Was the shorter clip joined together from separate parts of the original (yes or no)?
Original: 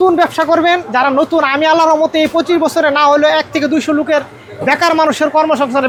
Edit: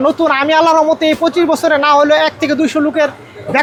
no